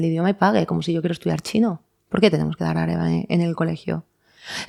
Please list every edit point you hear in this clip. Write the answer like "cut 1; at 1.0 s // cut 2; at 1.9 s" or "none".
none